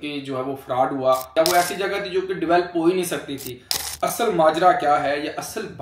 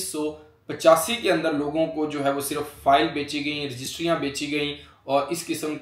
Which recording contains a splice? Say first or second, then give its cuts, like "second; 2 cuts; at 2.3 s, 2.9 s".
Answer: first; 2 cuts; at 1.3 s, 3.8 s